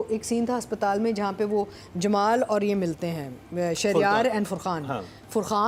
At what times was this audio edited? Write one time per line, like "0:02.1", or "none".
none

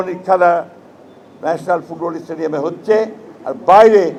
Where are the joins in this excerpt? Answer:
none

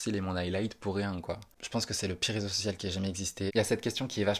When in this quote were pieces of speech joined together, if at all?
0:01.6
0:03.5

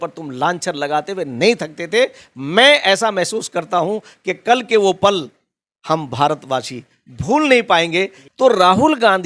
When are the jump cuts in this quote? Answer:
0:08.2

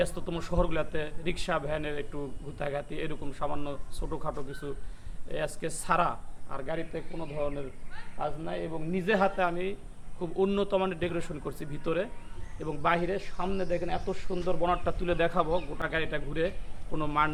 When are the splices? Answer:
none

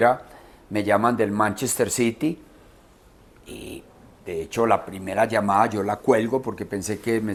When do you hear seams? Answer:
none

